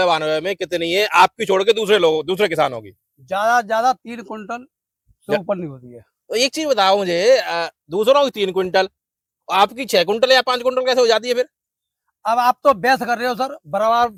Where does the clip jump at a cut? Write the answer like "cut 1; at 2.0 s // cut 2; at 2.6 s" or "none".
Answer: none